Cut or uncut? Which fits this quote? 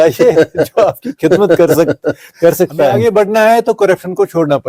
cut